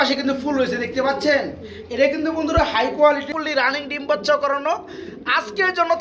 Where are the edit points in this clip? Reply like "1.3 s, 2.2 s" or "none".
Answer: 3.3 s